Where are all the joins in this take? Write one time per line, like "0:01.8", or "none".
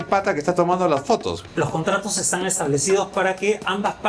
0:01.4